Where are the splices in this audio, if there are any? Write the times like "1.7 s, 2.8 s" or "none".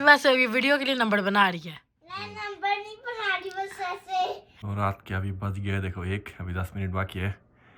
4.7 s